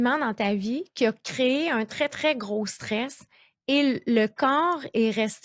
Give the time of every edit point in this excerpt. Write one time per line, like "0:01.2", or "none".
none